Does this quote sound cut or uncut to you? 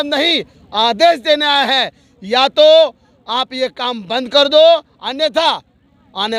uncut